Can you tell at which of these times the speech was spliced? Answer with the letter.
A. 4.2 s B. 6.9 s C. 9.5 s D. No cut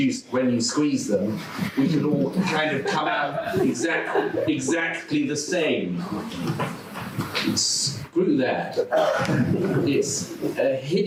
D